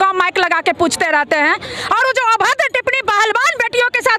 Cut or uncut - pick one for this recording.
uncut